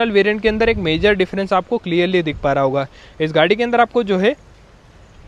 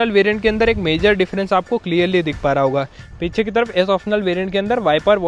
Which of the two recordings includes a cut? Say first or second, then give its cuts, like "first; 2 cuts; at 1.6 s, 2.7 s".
second; 1 cut; at 3.0 s